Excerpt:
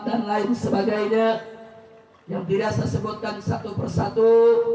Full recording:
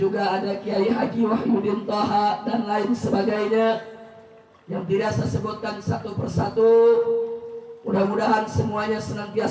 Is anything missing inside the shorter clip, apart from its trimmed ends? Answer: no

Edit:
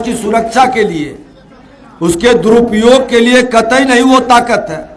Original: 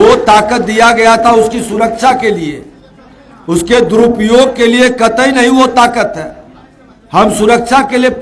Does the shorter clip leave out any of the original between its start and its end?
no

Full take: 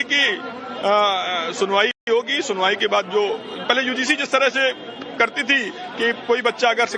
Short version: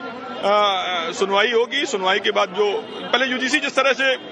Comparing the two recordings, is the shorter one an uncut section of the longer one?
no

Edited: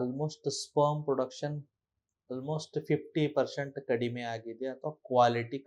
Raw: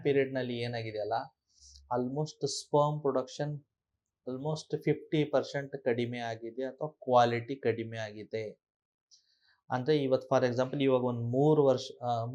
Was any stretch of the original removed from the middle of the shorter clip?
no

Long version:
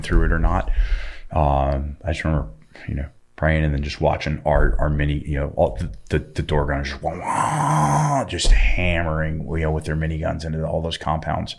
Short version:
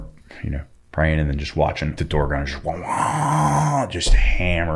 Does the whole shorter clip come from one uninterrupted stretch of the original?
no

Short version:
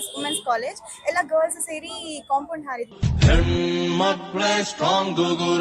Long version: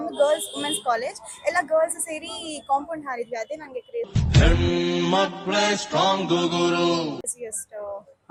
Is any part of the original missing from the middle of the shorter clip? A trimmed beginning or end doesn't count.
yes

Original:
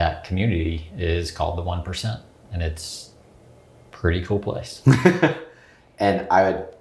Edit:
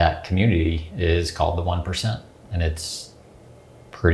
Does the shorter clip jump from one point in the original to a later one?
no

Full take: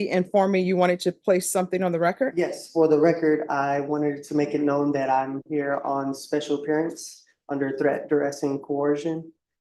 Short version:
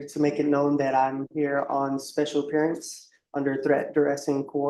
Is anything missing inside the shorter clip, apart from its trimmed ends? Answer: no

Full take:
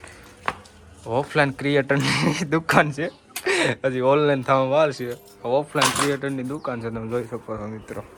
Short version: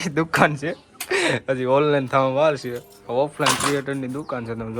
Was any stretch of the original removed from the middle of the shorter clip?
no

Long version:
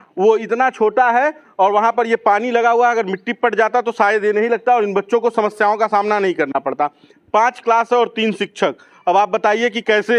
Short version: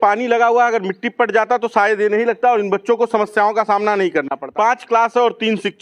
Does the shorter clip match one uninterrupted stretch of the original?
no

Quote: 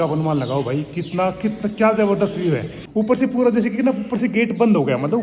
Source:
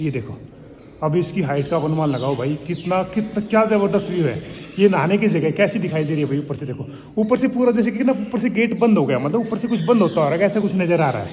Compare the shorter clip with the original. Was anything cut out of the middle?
yes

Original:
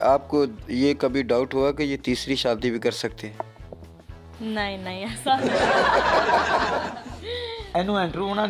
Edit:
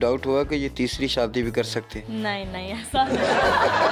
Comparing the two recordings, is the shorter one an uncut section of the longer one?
no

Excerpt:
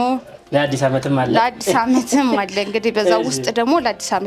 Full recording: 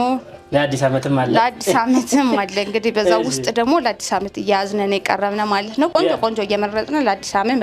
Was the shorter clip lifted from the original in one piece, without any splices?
yes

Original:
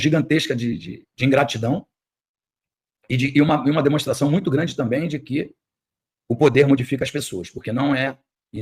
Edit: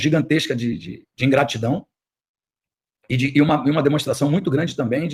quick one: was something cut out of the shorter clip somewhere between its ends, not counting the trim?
no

